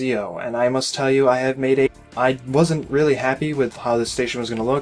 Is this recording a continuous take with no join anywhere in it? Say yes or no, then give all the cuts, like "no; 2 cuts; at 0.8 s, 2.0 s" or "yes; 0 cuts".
yes; 0 cuts